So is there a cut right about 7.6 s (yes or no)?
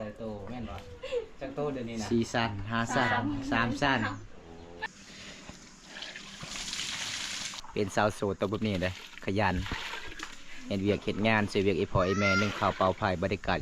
yes